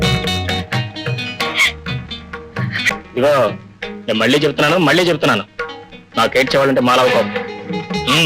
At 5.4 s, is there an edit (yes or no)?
no